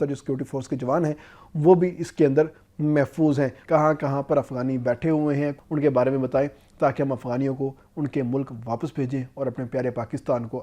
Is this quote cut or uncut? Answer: cut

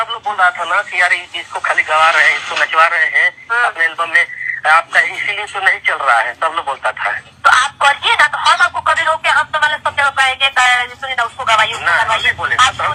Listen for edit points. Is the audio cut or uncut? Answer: uncut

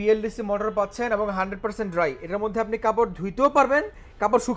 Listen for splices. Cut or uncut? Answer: uncut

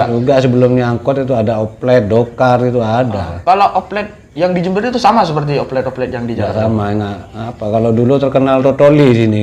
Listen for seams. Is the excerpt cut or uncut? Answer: uncut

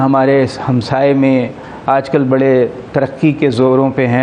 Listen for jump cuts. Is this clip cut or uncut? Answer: uncut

